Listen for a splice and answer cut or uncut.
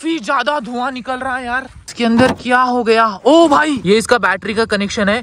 cut